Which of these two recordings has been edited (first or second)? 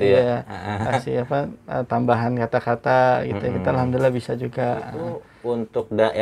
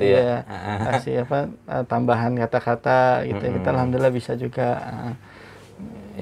first